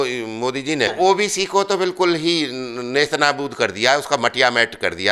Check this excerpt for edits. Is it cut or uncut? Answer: cut